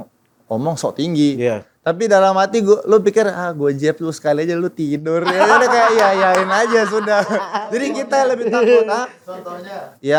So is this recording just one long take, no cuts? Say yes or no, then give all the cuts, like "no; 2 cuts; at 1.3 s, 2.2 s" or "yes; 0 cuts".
yes; 0 cuts